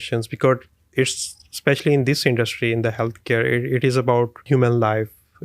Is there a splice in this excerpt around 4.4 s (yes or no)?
yes